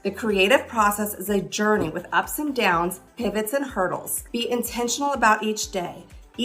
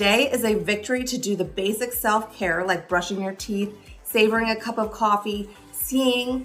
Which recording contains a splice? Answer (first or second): first